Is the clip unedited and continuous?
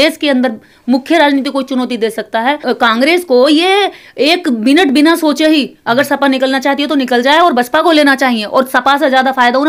no; 1 cut; at 2.6 s

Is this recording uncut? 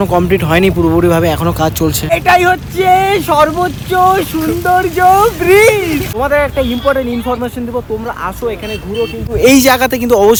yes; 0 cuts

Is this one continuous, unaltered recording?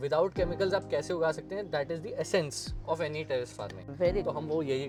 yes; 0 cuts

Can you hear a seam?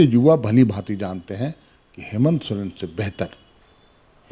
no; 0 cuts

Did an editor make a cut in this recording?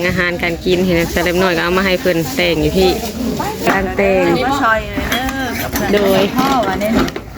yes; 1 cut; at 3.7 s

